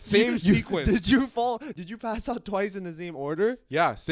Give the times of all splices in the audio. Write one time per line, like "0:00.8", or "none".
0:01.7

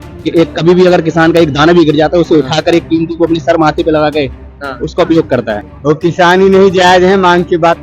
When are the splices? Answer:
0:05.7

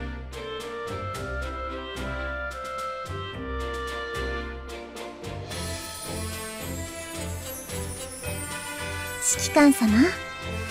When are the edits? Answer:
none

